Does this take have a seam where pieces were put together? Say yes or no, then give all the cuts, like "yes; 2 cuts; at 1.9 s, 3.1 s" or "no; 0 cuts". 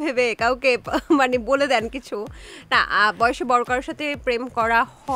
no; 0 cuts